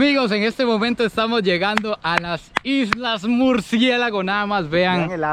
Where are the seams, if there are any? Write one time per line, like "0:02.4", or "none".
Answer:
none